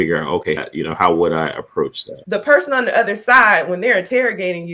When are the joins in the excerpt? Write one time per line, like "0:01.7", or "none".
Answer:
0:02.2